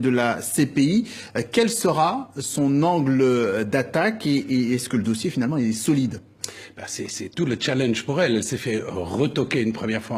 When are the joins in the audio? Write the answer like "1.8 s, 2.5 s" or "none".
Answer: 4.2 s